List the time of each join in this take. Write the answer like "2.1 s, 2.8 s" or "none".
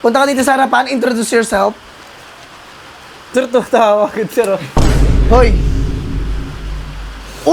none